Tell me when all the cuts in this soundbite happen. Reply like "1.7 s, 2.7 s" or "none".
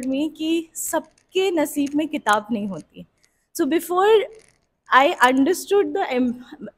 none